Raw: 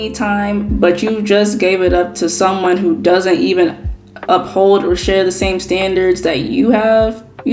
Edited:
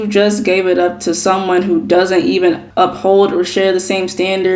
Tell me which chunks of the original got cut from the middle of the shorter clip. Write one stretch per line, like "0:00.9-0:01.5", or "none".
0:03.8-0:04.2